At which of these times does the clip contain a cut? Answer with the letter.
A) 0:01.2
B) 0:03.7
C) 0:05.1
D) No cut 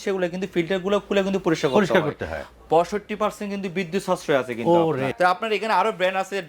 C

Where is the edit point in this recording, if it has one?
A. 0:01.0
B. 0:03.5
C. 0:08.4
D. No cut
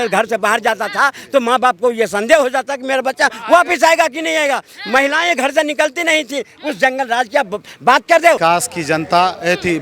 C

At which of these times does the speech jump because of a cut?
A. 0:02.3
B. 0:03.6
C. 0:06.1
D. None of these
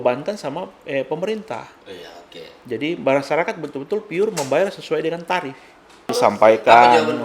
C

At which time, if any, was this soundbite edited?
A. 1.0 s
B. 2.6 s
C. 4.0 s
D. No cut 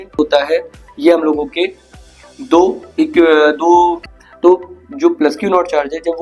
C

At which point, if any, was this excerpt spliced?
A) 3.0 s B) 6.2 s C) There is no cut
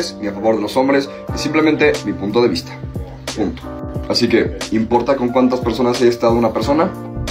C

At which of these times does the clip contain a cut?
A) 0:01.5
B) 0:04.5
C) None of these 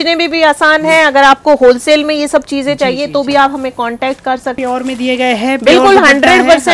B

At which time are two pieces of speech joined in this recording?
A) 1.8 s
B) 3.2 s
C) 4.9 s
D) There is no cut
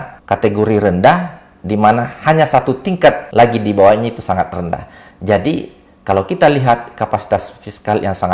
B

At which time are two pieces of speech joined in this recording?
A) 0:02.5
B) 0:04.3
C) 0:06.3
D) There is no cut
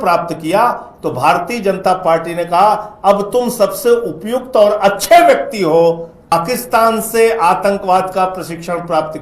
C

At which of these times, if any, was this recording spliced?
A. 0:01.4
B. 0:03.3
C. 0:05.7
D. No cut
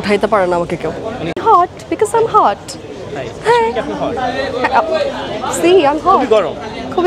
A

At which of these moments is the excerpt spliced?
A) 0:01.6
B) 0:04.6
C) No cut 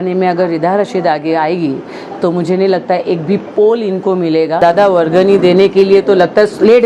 B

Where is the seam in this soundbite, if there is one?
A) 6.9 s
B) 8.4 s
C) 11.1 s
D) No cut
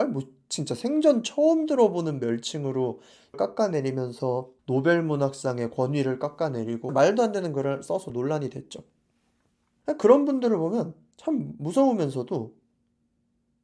A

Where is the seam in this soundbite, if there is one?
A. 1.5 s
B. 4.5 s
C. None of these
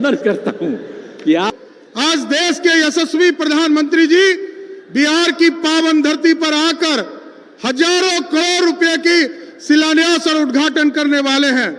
A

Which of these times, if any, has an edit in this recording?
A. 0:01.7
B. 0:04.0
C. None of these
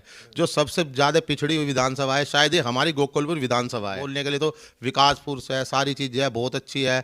B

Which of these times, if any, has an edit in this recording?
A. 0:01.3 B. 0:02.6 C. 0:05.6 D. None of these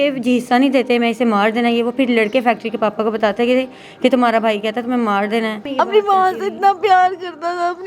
C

